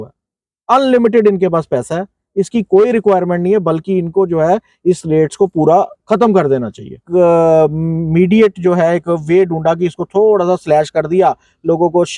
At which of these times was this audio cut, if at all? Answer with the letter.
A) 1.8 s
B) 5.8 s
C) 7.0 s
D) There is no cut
C